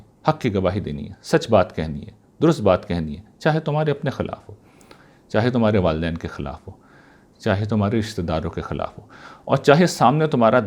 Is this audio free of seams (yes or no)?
yes